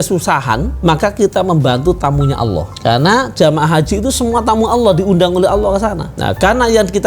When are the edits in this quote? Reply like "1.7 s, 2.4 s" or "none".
2.7 s, 6.1 s